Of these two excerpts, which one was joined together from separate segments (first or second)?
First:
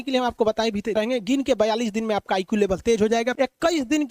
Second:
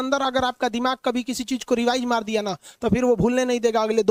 first